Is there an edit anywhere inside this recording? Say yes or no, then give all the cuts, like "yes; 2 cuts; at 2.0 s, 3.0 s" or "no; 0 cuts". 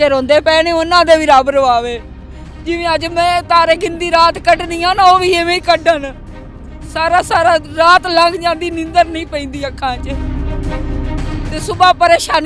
no; 0 cuts